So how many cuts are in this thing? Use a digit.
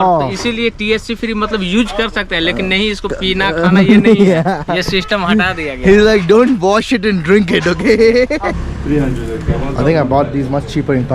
1